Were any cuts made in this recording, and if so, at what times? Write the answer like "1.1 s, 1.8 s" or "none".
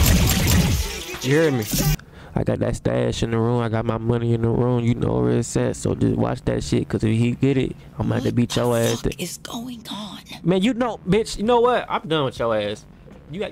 2.1 s

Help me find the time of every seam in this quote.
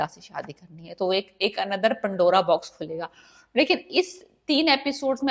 none

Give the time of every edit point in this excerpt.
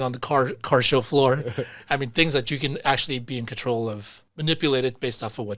4.2 s

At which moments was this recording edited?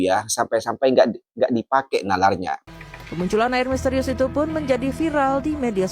2.6 s

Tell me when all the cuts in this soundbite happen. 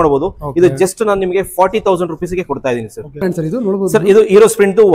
3.2 s

